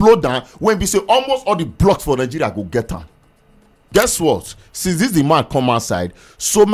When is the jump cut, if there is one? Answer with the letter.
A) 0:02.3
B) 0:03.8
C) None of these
B